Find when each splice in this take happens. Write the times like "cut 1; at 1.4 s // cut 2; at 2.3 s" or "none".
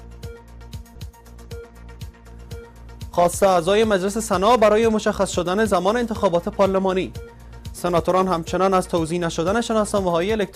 none